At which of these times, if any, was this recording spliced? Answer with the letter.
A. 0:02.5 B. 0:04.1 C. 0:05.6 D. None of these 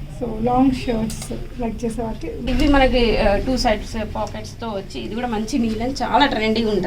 A